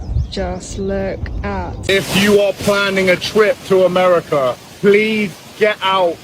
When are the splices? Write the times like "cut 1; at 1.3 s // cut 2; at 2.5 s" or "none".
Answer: cut 1; at 1.7 s // cut 2; at 4.7 s

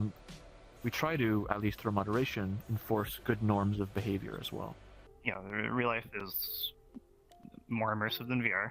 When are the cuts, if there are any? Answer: cut 1; at 5.0 s

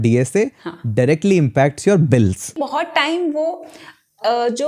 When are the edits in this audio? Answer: cut 1; at 2.6 s

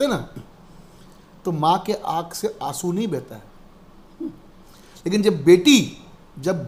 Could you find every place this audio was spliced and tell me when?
none

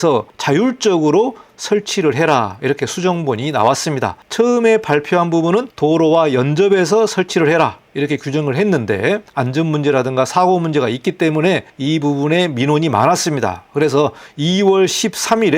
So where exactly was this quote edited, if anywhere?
none

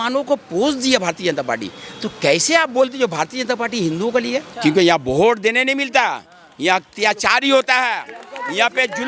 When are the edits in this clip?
cut 1; at 4.5 s

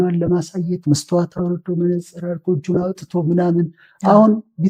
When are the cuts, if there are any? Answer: none

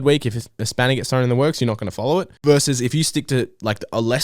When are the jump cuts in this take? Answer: cut 1; at 2.3 s

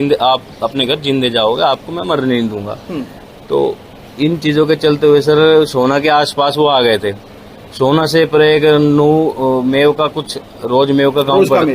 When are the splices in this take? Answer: none

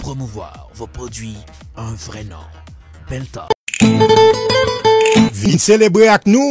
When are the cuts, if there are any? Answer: cut 1; at 3.6 s

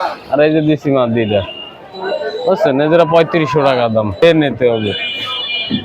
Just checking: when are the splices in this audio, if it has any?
cut 1; at 4.2 s

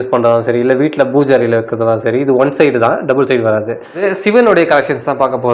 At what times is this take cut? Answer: cut 1; at 4.0 s

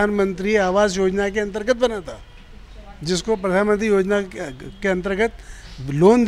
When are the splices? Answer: none

